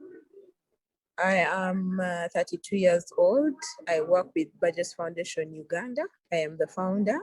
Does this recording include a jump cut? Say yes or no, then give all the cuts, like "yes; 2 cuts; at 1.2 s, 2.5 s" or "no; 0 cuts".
no; 0 cuts